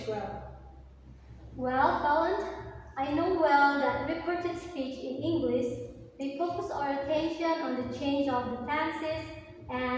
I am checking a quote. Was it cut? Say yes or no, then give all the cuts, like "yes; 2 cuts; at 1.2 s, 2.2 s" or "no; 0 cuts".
no; 0 cuts